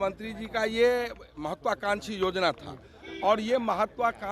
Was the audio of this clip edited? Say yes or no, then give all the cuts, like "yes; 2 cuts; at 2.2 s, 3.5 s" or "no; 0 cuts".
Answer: no; 0 cuts